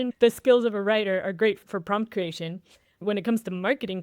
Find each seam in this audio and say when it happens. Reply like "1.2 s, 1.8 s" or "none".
3.0 s